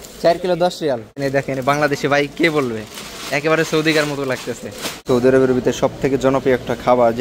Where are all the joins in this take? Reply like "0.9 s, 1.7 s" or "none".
1.2 s, 5.0 s